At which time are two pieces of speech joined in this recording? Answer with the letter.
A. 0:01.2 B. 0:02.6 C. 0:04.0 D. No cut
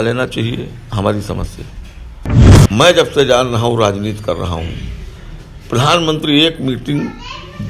B